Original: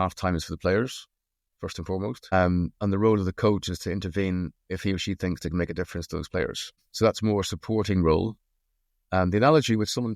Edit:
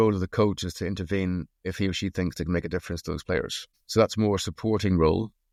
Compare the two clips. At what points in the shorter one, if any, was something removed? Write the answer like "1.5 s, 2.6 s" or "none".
none